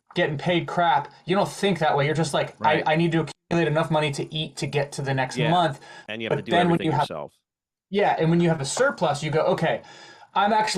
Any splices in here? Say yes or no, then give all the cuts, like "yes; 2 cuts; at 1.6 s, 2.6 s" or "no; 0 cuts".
no; 0 cuts